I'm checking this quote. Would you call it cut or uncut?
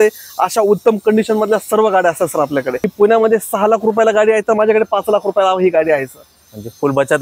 cut